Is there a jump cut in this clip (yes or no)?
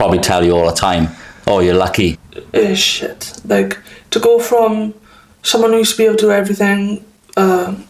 yes